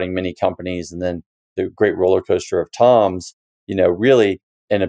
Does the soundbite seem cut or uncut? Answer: uncut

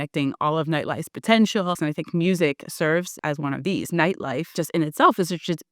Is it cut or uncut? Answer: cut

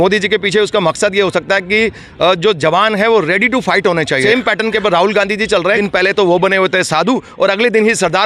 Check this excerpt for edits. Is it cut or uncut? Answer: cut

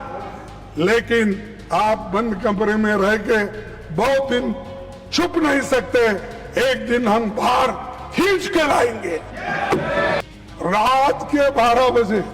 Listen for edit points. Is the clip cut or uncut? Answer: cut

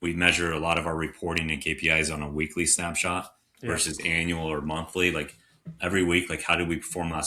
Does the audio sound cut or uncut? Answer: uncut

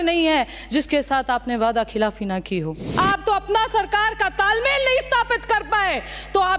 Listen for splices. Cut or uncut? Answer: cut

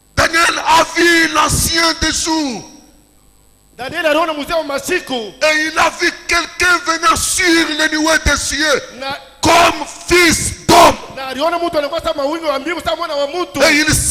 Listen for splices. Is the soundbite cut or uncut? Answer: uncut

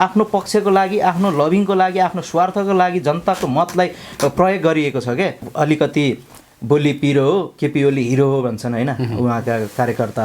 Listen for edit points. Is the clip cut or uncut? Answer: cut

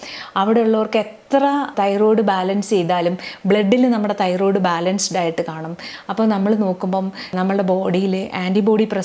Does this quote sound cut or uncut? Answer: cut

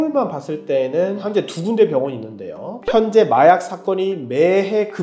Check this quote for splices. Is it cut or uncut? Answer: cut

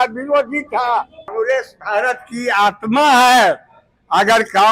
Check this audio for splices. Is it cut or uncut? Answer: cut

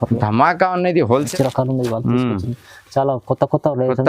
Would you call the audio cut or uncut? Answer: cut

